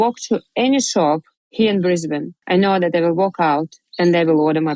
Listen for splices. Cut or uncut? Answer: cut